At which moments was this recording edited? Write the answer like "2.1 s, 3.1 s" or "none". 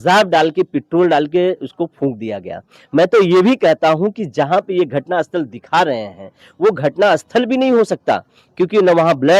none